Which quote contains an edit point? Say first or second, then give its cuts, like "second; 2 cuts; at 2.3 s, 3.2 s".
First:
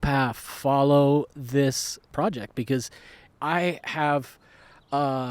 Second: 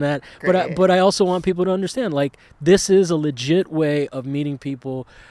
first; 2 cuts; at 2.1 s, 3.2 s